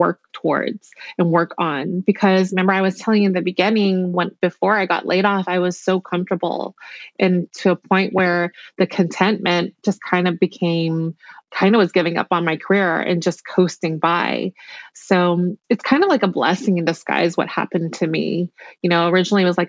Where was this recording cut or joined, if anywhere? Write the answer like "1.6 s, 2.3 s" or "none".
none